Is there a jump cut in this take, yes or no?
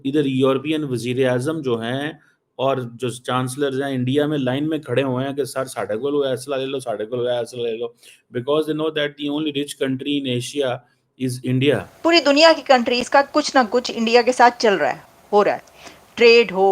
yes